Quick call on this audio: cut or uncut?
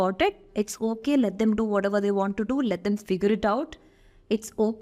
uncut